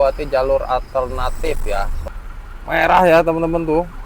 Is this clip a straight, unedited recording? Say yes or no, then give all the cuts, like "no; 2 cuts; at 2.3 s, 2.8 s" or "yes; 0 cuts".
no; 1 cut; at 2.0 s